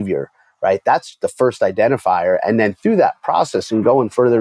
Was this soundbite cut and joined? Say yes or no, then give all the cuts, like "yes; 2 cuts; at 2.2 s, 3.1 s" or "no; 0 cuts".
no; 0 cuts